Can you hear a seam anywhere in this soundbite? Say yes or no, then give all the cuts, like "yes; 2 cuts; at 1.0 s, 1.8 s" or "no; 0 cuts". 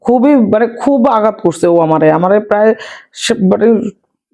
no; 0 cuts